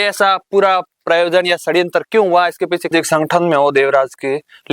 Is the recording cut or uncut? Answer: cut